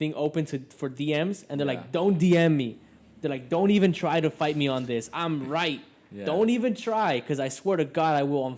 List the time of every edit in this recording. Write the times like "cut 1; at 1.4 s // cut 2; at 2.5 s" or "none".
none